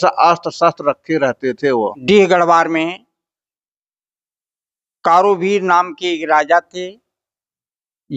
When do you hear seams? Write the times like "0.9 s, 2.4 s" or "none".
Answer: 2.0 s